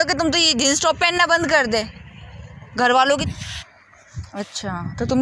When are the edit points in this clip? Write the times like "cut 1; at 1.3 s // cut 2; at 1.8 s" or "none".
cut 1; at 3.2 s